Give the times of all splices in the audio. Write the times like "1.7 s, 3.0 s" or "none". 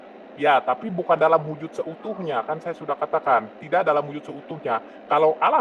none